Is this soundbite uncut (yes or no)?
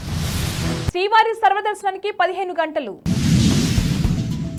yes